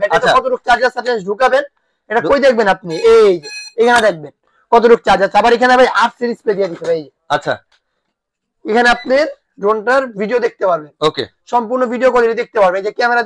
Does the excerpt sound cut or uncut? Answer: uncut